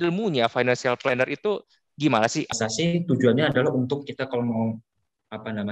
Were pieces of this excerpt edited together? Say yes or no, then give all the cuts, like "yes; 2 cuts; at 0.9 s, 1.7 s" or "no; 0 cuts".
yes; 1 cut; at 2.5 s